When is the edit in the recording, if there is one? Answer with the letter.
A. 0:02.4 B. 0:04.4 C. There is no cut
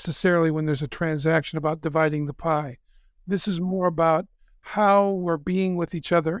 C